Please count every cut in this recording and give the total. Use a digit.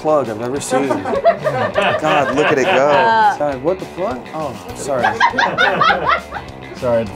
1